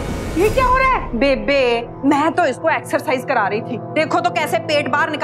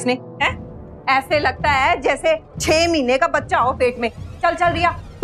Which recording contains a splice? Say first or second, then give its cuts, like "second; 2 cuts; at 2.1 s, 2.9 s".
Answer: first; 1 cut; at 1.1 s